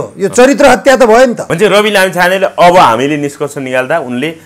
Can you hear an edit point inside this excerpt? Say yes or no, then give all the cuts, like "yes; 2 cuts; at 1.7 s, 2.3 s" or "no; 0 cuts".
yes; 1 cut; at 1.4 s